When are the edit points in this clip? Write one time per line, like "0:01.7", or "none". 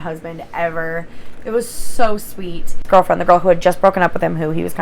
0:02.8